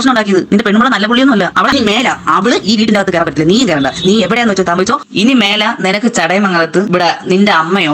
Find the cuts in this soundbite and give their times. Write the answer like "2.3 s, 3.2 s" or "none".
1.7 s